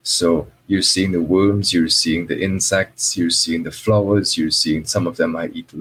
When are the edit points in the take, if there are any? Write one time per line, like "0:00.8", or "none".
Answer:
none